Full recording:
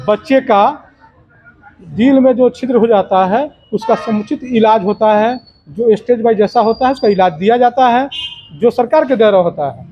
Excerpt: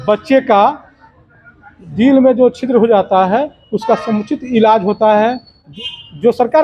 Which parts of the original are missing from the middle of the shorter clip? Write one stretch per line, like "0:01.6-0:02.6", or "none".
0:05.7-0:08.1